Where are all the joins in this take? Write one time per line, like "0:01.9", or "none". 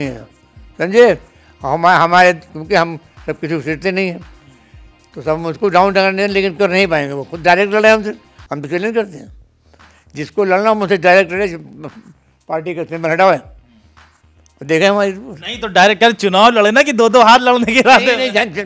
none